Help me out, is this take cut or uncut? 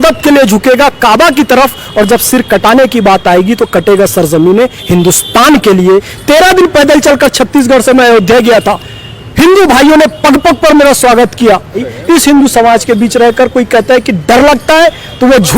cut